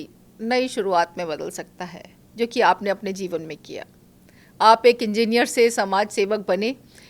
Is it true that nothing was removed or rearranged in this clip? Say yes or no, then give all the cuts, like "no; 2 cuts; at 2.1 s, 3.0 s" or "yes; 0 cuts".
yes; 0 cuts